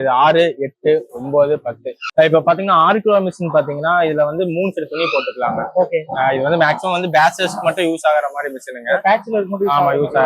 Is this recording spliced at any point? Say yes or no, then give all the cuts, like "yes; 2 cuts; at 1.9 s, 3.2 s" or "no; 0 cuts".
yes; 1 cut; at 2.0 s